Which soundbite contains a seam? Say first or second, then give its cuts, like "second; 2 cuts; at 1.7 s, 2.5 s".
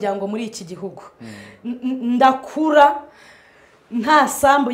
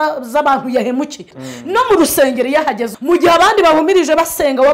second; 2 cuts; at 1.3 s, 2.9 s